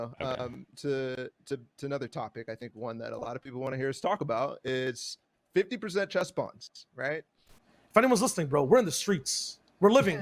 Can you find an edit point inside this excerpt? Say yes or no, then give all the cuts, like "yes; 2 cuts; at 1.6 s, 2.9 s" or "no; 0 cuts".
yes; 1 cut; at 7.6 s